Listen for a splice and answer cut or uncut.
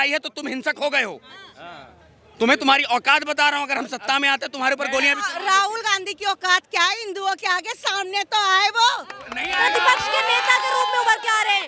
uncut